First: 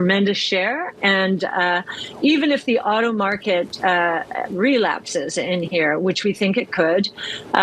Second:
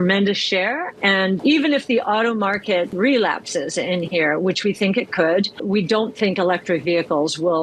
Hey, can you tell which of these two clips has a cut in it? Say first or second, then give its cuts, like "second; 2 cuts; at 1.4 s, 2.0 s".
second; 3 cuts; at 1.4 s, 2.9 s, 5.6 s